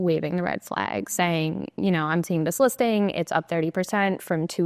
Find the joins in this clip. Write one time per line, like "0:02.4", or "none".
none